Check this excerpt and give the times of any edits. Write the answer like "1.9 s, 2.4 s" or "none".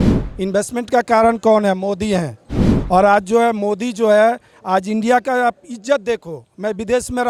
none

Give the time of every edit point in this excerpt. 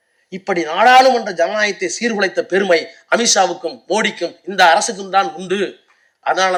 none

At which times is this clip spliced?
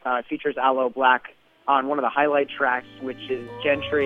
none

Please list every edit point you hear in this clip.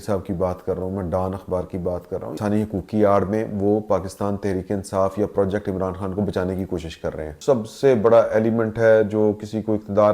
2.4 s, 7.3 s

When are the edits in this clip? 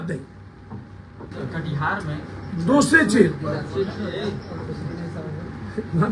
1.3 s

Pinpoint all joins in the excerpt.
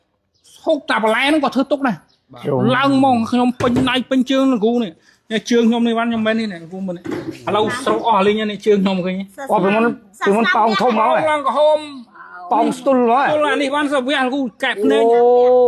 none

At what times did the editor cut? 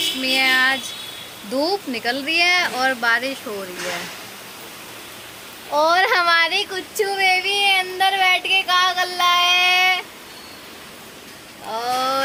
none

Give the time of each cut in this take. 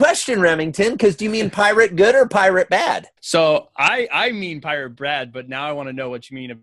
3.1 s

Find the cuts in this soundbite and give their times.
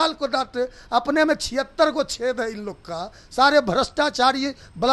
none

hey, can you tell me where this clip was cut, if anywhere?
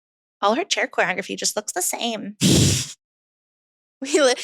none

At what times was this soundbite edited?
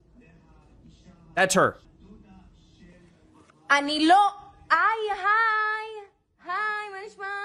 none

